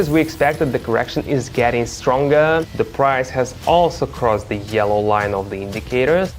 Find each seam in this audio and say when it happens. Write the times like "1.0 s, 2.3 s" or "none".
2.7 s

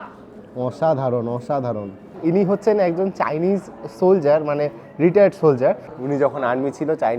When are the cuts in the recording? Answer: 2.1 s, 5.9 s

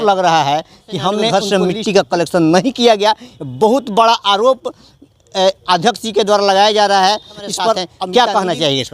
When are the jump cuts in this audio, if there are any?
1.3 s, 7.9 s

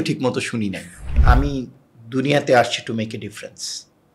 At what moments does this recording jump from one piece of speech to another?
1.2 s

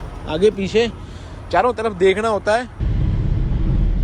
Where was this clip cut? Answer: 2.8 s

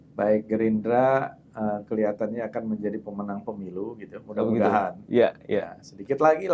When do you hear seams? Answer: none

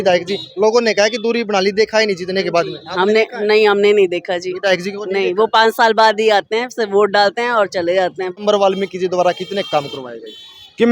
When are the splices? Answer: 8.4 s

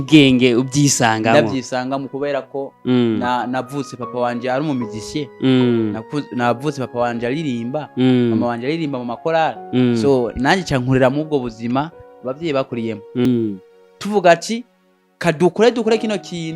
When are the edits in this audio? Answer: 13.2 s

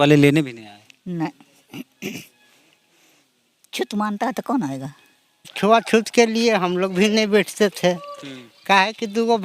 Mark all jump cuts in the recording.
5.5 s

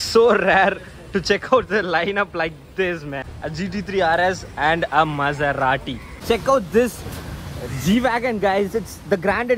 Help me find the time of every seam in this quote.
3.3 s, 6.2 s

